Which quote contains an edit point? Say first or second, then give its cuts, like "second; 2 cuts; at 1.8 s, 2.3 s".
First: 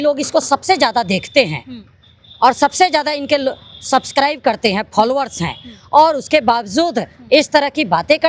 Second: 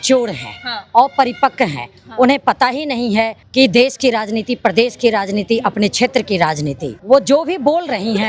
second; 2 cuts; at 3.4 s, 6.9 s